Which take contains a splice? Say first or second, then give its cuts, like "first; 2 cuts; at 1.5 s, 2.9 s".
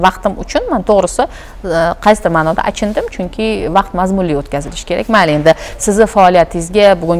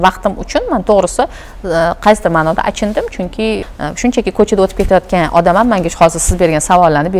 second; 1 cut; at 3.6 s